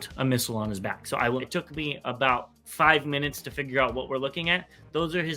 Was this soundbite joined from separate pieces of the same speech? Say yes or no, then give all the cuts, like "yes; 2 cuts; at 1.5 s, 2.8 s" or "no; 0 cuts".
yes; 1 cut; at 1.4 s